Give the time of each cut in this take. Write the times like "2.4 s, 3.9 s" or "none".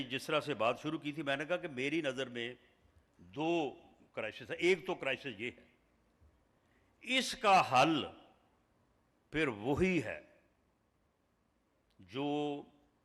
none